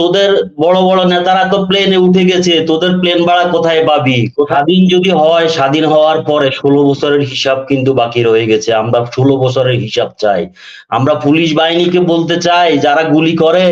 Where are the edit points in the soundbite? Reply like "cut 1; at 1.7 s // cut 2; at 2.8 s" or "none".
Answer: cut 1; at 4.5 s